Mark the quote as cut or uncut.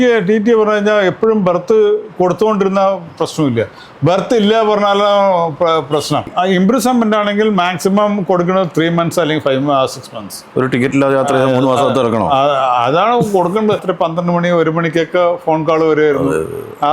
cut